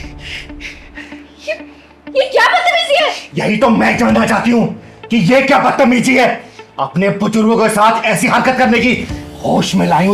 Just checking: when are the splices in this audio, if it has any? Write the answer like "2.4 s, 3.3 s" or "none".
none